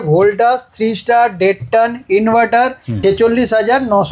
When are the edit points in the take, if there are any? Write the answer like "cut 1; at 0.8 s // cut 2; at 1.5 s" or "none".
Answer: cut 1; at 2.9 s

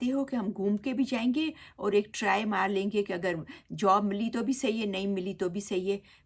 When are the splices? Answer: none

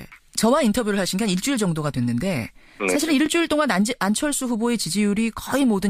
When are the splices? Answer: none

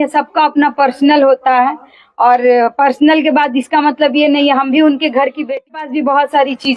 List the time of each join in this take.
cut 1; at 5.7 s

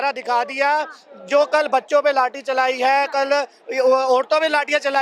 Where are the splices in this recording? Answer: none

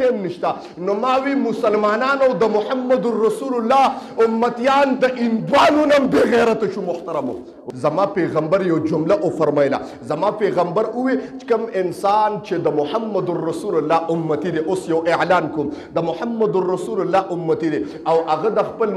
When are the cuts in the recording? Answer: cut 1; at 7.6 s

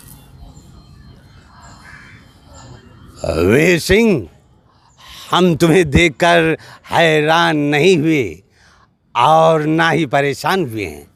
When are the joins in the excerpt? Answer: none

